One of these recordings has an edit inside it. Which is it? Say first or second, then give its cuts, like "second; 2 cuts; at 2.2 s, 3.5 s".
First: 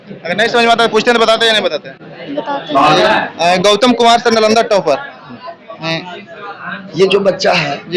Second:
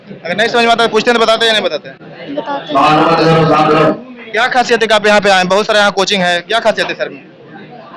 first; 1 cut; at 2.9 s